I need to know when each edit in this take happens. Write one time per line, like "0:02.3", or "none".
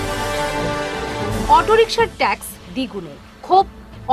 0:01.4